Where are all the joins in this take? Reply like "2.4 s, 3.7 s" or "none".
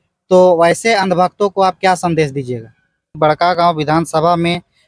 3.2 s